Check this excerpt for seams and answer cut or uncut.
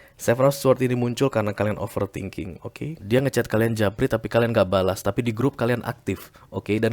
cut